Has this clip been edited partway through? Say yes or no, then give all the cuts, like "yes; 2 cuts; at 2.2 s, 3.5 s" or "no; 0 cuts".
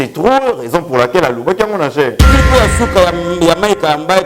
yes; 1 cut; at 2.3 s